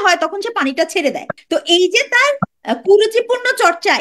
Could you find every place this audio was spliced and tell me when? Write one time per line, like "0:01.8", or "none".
0:01.3
0:02.5